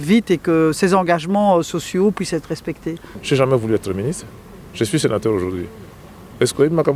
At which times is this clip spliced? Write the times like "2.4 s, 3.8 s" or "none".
3.1 s

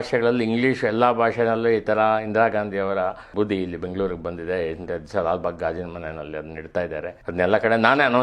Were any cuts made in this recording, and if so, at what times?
3.2 s, 7.2 s

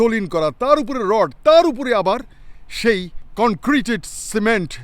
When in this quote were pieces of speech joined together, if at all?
3.2 s

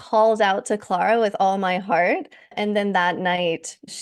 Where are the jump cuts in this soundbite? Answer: 2.4 s

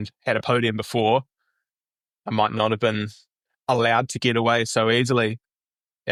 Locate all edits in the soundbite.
none

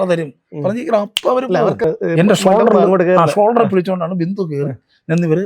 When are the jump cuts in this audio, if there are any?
1.8 s

